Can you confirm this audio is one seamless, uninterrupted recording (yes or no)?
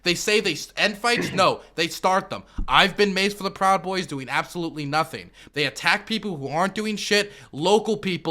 no